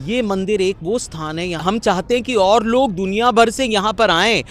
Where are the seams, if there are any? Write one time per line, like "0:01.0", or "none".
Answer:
0:01.6

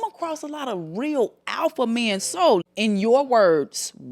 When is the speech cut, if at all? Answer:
0:02.6

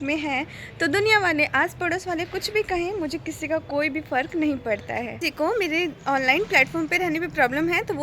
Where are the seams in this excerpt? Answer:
0:05.2

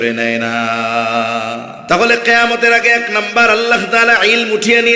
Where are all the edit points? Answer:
0:01.7

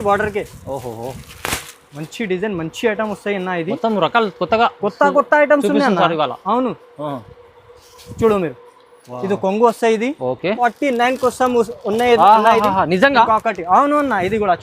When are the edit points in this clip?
0:10.6

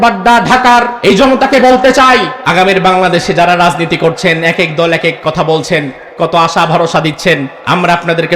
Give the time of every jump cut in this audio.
0:00.9
0:02.4
0:07.5

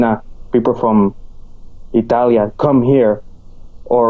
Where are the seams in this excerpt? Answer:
none

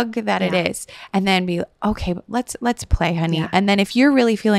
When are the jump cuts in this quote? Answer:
none

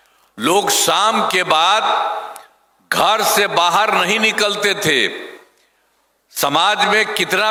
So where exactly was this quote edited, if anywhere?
none

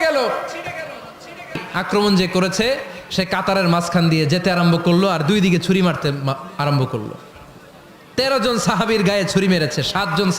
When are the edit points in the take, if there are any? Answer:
0:01.7

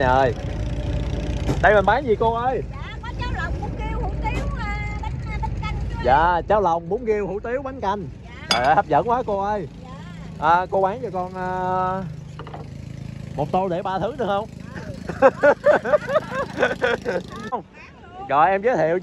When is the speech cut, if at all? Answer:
0:17.8

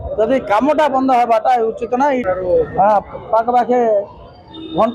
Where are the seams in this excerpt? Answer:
0:02.2

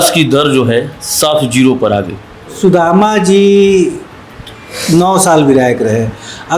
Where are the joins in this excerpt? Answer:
0:02.5

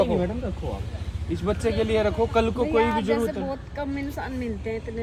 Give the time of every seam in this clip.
none

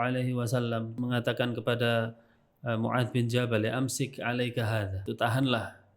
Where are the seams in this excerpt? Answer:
0:00.9
0:05.0

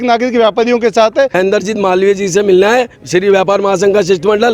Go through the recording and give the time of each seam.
0:01.3

